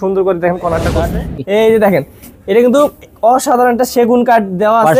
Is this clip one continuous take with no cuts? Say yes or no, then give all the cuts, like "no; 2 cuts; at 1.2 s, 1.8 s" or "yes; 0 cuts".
no; 1 cut; at 1.0 s